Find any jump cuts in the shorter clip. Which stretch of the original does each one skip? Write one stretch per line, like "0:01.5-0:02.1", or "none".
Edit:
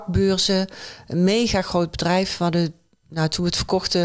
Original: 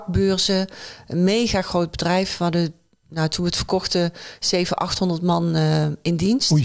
none